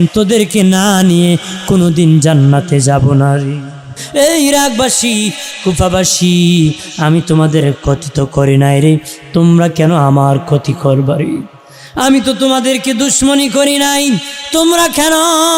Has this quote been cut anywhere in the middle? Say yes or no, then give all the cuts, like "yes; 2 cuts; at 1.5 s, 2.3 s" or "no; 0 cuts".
yes; 1 cut; at 4.0 s